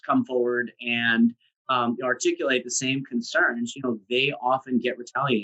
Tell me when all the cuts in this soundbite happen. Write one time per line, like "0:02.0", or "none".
none